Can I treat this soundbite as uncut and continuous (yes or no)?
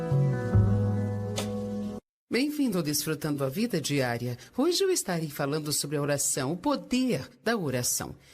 no